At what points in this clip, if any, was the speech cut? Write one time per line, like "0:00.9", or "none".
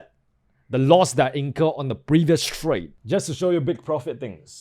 0:02.9